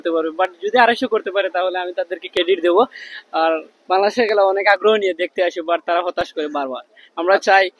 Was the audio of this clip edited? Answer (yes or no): no